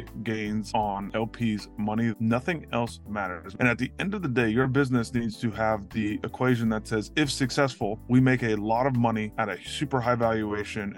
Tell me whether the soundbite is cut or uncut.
cut